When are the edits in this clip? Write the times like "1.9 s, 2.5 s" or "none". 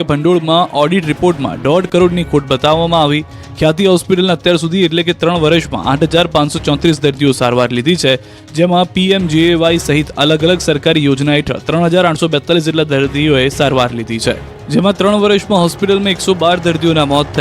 16.2 s